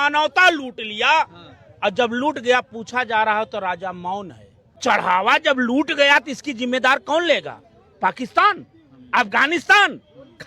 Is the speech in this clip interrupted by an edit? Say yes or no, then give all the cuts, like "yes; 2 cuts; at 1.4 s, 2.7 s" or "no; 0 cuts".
yes; 1 cut; at 4.8 s